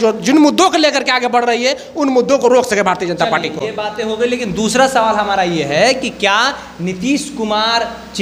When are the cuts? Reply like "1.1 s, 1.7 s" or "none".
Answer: none

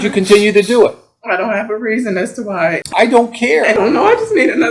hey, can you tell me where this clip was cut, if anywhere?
2.8 s, 3.8 s

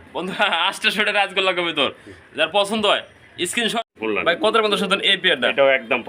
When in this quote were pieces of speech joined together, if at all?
3.8 s

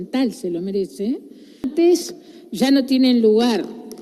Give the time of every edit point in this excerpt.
1.7 s

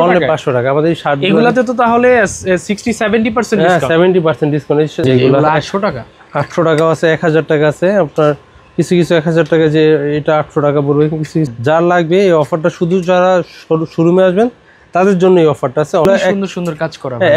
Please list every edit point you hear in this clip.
5.0 s, 11.5 s, 16.1 s

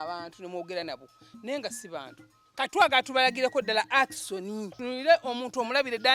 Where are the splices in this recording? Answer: 2.4 s, 4.8 s

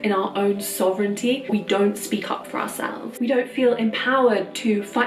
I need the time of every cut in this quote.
1.5 s, 3.0 s

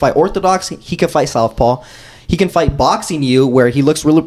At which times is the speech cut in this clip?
none

